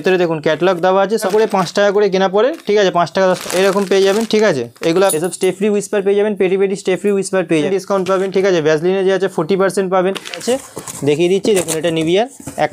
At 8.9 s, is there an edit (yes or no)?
no